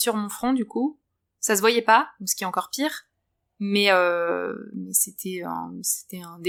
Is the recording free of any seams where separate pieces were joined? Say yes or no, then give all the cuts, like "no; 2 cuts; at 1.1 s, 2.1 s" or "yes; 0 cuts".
yes; 0 cuts